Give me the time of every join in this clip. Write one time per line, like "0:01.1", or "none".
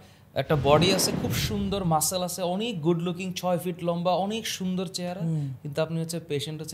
none